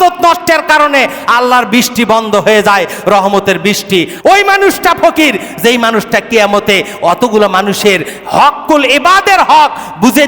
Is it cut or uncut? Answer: cut